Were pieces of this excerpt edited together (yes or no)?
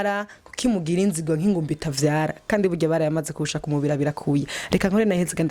no